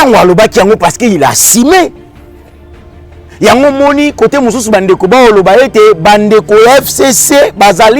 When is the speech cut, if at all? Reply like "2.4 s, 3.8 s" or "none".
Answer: none